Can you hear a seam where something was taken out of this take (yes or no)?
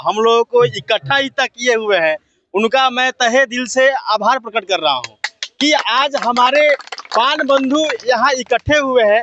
no